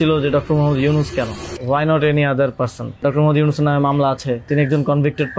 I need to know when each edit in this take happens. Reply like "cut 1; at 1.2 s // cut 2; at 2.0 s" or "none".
cut 1; at 1.5 s // cut 2; at 3.0 s // cut 3; at 4.5 s